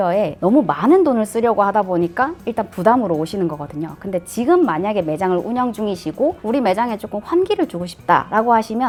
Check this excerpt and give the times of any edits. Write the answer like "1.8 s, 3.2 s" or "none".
none

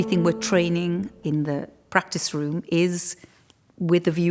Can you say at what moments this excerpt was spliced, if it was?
1.2 s

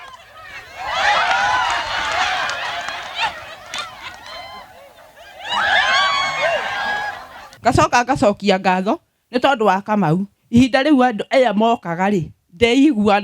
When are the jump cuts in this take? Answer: 7.5 s

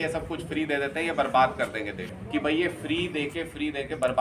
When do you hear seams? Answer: 2.1 s

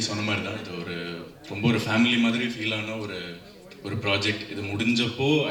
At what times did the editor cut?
none

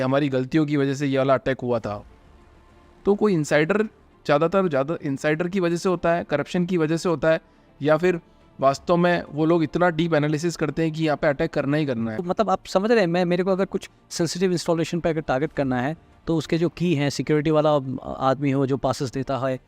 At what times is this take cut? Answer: 12.2 s

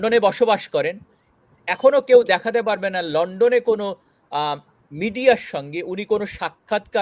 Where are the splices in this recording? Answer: none

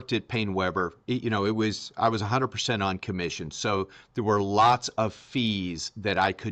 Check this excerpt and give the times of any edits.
none

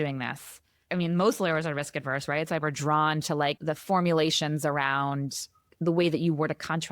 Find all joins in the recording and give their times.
0.8 s, 5.6 s

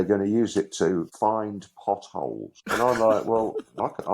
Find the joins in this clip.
1.1 s, 2.5 s

